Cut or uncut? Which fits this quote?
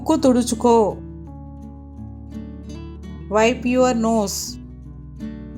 cut